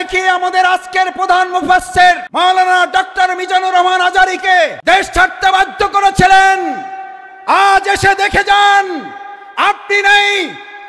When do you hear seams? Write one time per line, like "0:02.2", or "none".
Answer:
0:02.3
0:04.8